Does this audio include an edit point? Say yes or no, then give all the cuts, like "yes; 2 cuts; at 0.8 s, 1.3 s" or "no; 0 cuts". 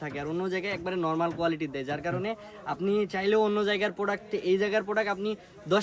no; 0 cuts